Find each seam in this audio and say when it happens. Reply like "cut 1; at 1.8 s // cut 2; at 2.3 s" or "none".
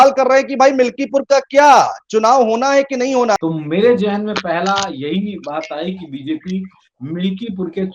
cut 1; at 3.4 s